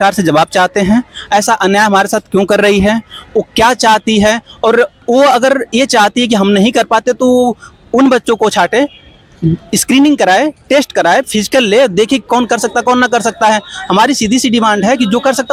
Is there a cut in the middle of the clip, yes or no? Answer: no